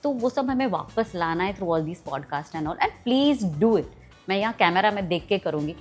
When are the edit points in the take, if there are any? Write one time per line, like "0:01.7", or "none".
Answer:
none